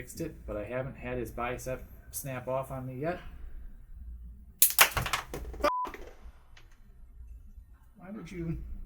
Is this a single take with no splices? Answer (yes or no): no